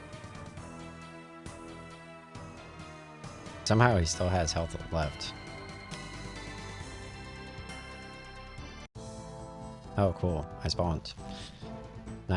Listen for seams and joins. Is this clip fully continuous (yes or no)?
no